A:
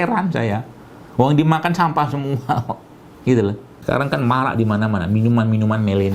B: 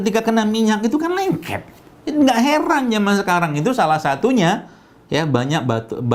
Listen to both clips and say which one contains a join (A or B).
A